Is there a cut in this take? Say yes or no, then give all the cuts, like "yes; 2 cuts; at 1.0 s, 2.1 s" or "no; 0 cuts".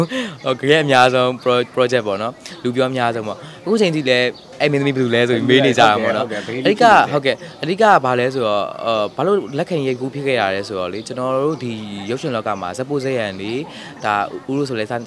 no; 0 cuts